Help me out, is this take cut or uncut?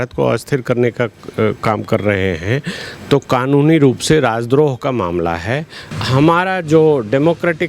cut